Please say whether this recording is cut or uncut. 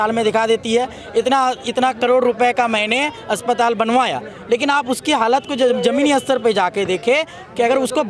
uncut